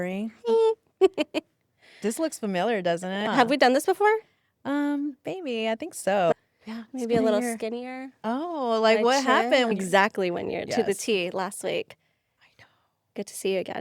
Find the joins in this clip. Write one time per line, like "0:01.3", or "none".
0:03.2
0:06.3
0:09.7